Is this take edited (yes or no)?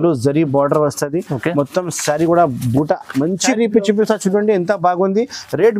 yes